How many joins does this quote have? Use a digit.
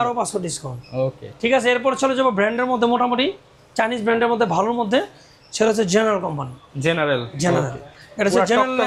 0